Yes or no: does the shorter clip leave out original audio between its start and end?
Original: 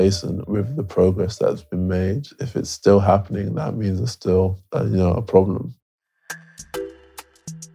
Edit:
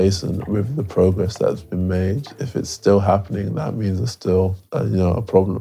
no